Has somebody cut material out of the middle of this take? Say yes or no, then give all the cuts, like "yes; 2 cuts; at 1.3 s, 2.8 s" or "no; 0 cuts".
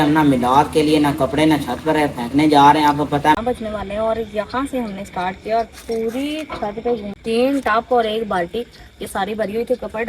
yes; 2 cuts; at 3.3 s, 7.1 s